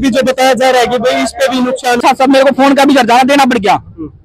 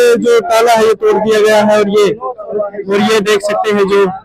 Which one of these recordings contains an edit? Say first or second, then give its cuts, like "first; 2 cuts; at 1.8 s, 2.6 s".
first; 1 cut; at 2.0 s